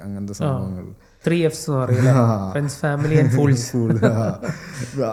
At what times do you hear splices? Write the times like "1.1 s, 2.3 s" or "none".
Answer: none